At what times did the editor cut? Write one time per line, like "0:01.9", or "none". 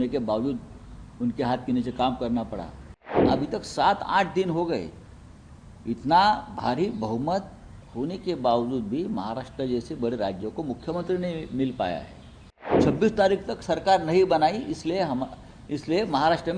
0:03.2
0:12.8